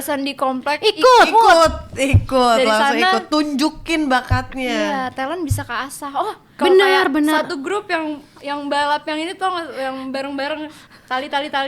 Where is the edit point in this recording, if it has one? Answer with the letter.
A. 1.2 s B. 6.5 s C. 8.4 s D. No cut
B